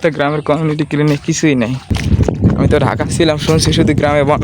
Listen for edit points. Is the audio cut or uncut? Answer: cut